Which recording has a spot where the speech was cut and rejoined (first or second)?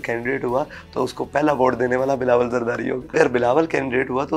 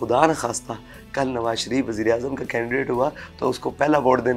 first